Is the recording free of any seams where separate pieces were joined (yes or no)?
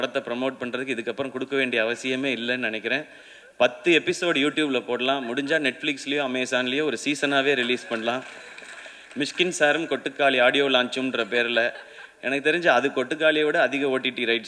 yes